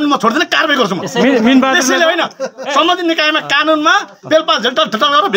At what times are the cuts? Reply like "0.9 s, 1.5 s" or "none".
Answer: none